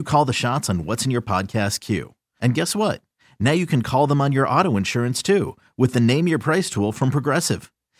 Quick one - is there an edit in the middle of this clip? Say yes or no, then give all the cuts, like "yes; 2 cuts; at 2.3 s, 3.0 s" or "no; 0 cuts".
no; 0 cuts